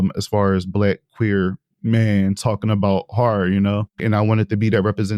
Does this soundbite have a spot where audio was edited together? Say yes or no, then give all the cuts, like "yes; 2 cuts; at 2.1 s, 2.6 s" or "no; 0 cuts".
yes; 1 cut; at 4.0 s